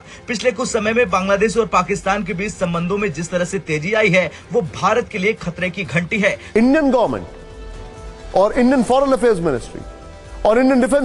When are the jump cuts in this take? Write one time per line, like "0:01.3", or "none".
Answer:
0:06.4